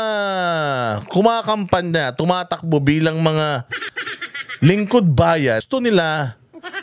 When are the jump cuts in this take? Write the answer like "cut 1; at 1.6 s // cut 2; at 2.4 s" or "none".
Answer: cut 1; at 5.6 s